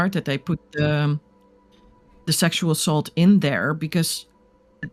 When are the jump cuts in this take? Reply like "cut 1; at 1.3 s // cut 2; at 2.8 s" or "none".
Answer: none